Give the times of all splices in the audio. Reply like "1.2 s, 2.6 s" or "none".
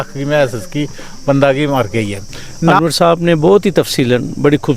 2.8 s